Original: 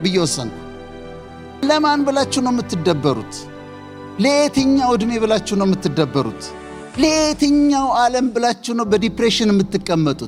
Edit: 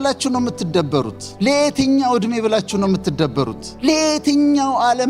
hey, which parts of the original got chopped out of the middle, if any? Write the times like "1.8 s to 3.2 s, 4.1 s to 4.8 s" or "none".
3.3 s to 4.0 s, 6.4 s to 6.8 s